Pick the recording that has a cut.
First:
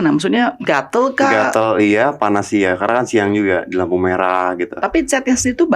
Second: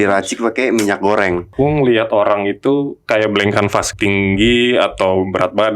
second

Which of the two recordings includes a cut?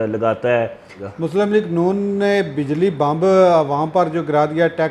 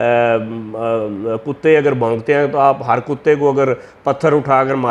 first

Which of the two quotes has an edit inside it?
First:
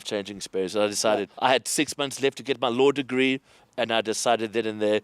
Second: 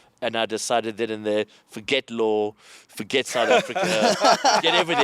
first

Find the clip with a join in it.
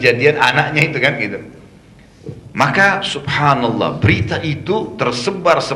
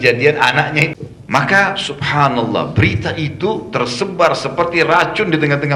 second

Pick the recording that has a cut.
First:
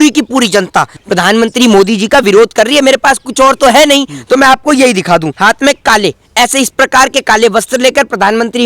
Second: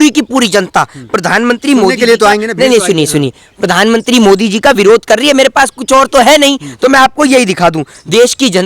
first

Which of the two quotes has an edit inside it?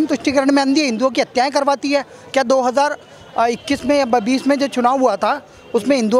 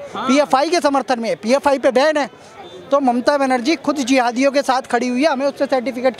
second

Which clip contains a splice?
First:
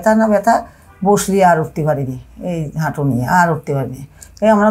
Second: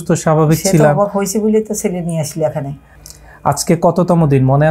second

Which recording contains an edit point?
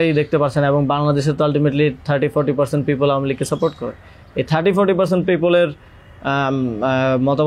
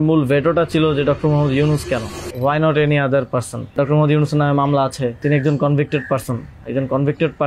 second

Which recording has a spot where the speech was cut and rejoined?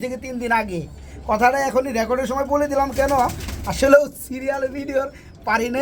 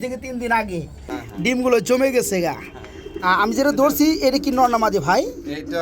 second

